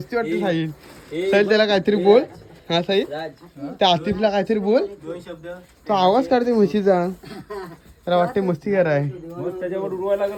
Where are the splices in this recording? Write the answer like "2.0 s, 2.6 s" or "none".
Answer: none